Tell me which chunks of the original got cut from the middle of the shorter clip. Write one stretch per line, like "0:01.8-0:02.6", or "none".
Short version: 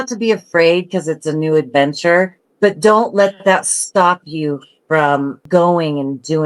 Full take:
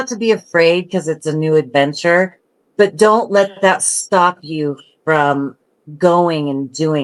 0:02.4-0:02.6
0:05.6-0:05.9